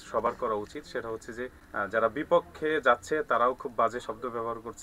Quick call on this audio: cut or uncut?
cut